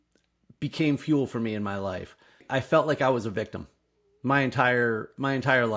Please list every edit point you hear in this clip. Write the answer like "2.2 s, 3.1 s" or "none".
2.4 s